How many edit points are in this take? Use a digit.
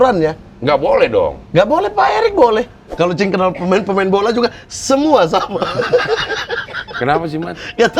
1